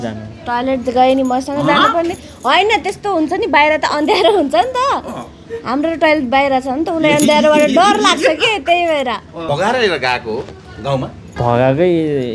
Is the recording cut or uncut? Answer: cut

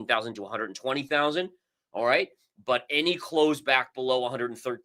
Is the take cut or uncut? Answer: uncut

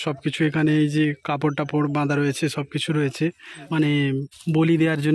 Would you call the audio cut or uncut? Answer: cut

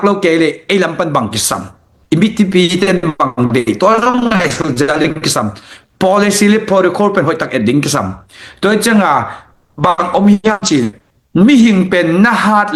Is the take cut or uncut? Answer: uncut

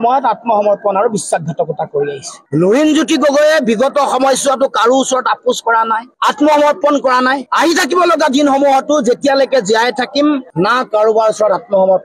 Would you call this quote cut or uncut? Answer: uncut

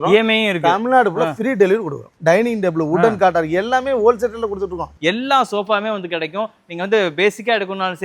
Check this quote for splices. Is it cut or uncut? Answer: cut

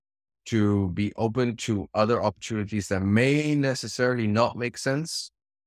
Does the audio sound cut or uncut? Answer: uncut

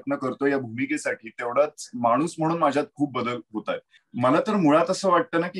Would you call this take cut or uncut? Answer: cut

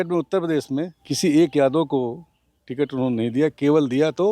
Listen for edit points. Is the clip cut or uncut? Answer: cut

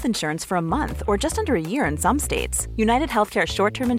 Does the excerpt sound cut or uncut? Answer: uncut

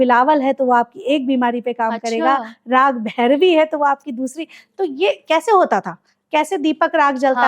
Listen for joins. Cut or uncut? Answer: uncut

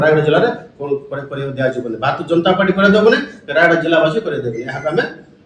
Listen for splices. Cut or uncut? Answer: uncut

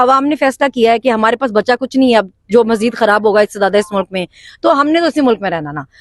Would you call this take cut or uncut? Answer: uncut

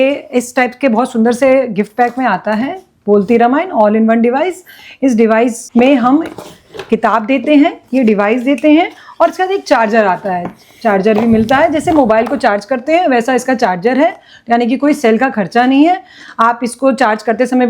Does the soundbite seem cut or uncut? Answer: cut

